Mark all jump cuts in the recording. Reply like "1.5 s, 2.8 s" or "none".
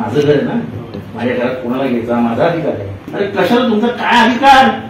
2.9 s

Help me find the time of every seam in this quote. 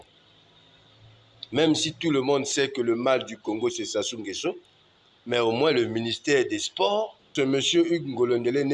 7.3 s

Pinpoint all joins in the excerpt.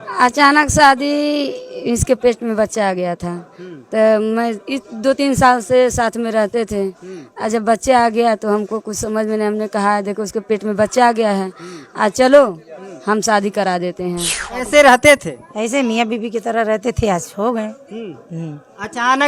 14.7 s

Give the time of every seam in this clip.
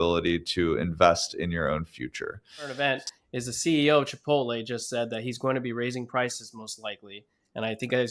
2.8 s

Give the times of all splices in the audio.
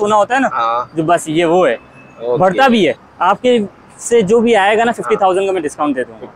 3.1 s

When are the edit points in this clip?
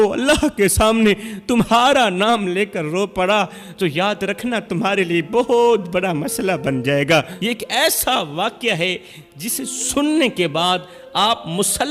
7.3 s

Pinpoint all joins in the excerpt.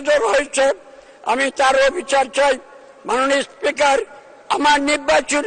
none

